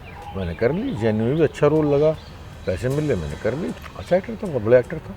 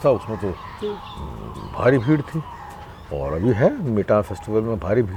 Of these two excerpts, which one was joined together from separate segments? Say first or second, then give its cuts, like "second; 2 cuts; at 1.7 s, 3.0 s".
first; 1 cut; at 3.7 s